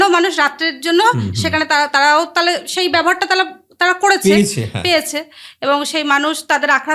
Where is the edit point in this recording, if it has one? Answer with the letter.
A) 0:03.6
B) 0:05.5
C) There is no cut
C